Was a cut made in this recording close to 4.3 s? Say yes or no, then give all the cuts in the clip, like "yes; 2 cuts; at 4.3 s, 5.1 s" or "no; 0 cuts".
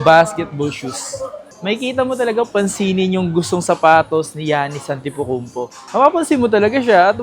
no; 1 cut; at 1.4 s